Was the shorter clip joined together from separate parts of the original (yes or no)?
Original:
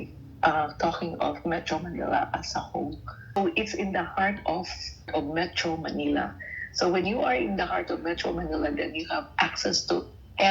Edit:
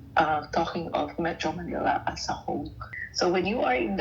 yes